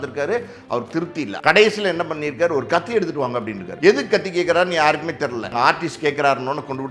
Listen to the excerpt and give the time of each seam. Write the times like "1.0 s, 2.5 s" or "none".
1.3 s, 3.6 s, 5.5 s